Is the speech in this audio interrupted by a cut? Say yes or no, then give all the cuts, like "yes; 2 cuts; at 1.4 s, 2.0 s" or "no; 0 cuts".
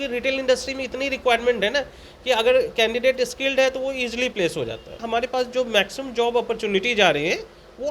yes; 1 cut; at 5.0 s